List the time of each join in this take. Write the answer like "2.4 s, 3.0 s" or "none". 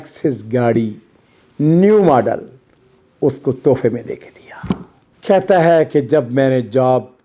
4.9 s